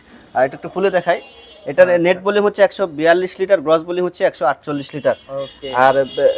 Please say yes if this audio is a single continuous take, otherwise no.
yes